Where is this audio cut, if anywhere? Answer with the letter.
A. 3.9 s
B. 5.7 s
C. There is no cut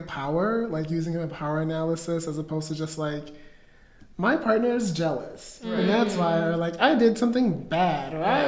C